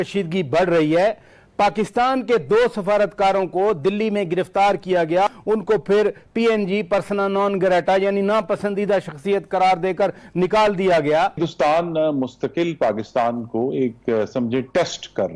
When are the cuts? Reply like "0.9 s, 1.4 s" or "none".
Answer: 5.3 s, 11.4 s